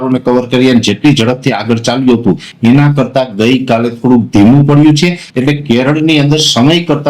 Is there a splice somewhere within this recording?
yes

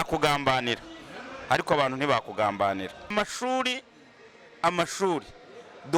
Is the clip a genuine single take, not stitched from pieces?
no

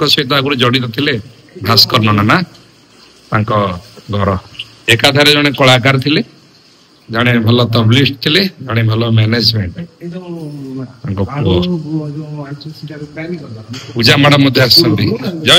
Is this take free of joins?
yes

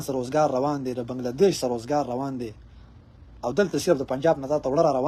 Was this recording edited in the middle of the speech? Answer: no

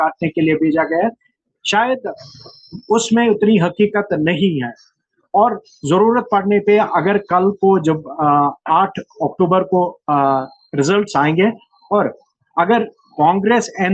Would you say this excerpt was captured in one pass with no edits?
yes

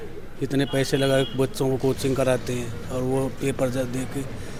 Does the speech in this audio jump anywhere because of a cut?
no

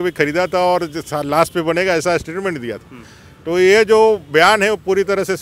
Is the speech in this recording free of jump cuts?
yes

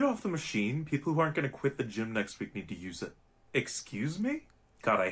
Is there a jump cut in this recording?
yes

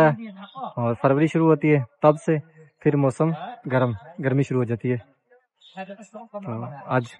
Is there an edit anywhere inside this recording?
no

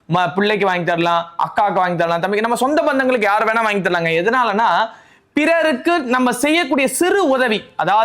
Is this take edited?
no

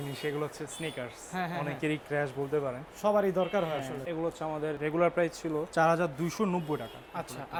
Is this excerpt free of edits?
yes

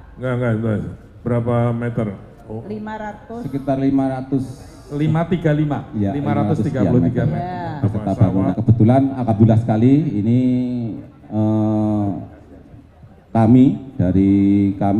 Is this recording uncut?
no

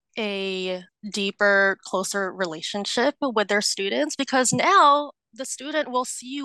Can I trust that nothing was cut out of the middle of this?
no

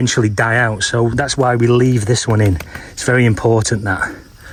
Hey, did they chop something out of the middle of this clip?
no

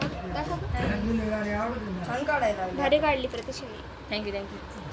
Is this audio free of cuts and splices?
yes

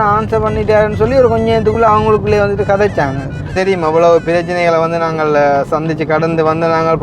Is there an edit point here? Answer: yes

